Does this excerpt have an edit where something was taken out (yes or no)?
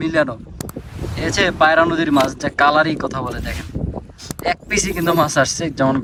no